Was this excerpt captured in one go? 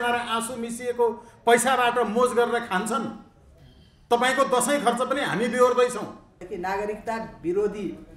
no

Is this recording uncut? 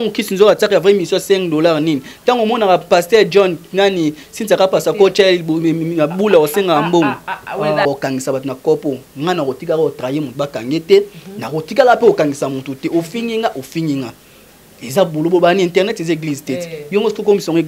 no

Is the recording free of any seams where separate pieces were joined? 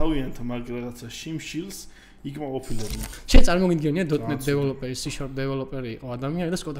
no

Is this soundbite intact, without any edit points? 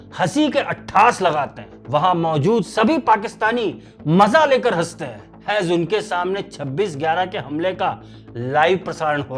yes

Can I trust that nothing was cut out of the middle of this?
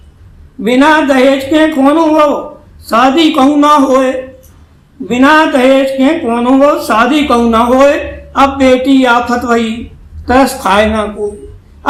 yes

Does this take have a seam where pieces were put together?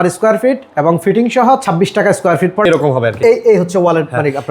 yes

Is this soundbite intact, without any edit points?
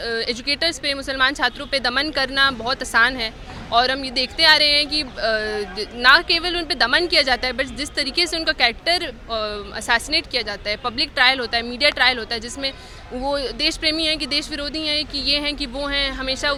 yes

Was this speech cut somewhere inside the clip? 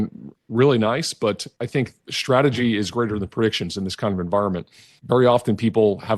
yes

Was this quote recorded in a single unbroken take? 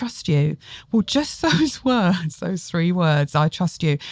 yes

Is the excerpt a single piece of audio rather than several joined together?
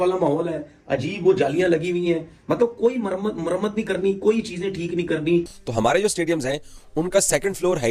no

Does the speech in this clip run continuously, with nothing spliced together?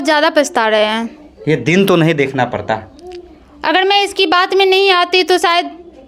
yes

